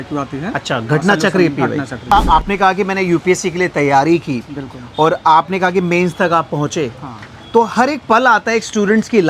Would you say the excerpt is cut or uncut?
cut